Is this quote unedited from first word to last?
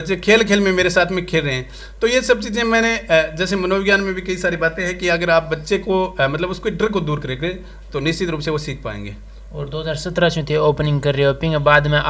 yes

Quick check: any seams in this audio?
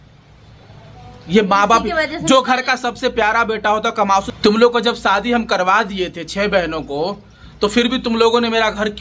yes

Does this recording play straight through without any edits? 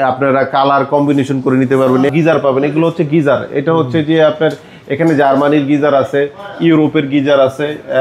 no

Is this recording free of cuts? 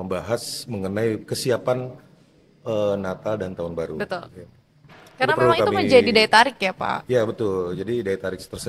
yes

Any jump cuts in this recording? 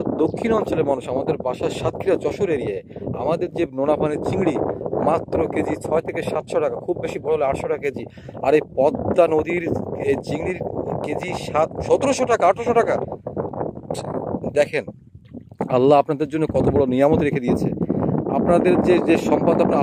no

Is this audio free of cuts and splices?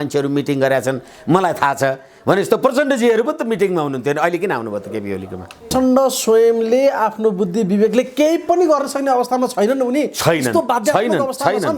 no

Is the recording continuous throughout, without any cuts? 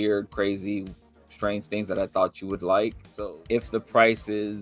no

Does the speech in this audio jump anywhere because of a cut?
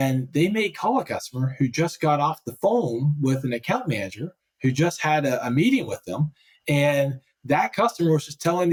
no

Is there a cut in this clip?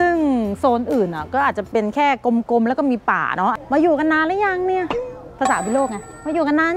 yes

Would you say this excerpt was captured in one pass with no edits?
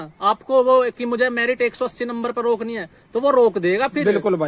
yes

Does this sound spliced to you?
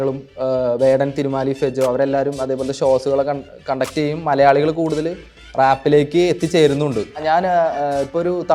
yes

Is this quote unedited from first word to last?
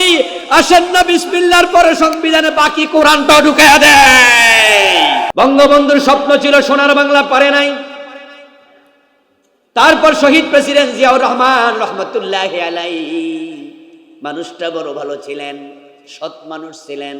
no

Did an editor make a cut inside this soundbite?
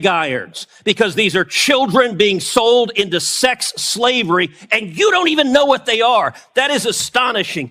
no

